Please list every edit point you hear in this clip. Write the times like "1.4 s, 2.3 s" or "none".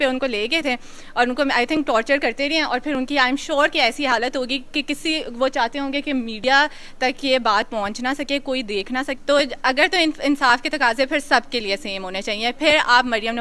9.1 s